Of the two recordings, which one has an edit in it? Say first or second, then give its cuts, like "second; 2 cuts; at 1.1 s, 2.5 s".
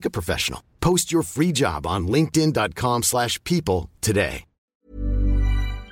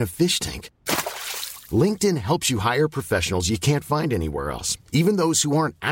first; 1 cut; at 4.9 s